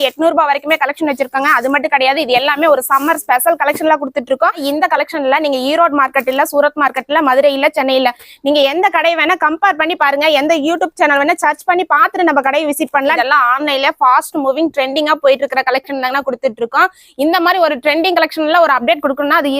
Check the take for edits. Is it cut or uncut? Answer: cut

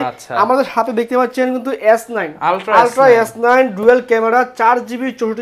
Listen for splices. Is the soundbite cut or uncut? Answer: uncut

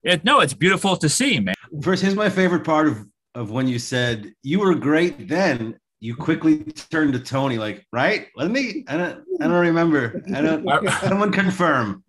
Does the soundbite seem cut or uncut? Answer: cut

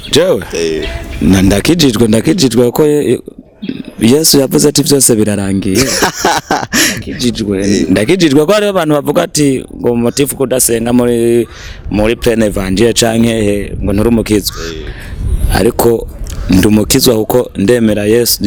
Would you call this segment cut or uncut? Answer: uncut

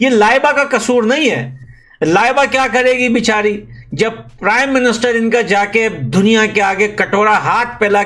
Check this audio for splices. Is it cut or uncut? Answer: uncut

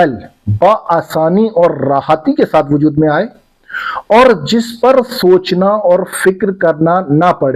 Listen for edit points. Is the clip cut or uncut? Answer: uncut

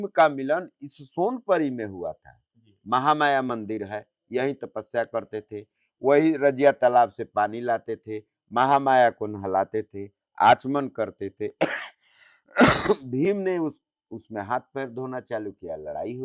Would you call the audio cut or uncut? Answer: uncut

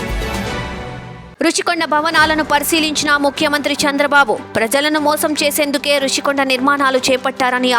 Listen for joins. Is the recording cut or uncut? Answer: cut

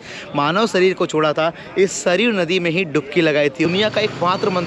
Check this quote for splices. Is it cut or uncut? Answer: cut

